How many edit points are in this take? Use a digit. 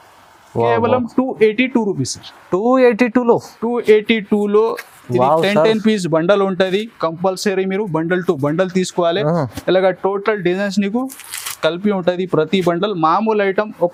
0